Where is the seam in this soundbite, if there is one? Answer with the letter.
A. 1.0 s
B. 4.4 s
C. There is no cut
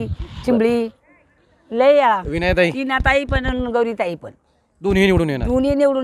C